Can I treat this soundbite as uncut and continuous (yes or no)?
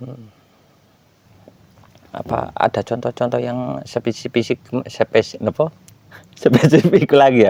no